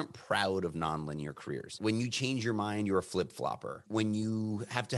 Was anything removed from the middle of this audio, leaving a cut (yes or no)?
yes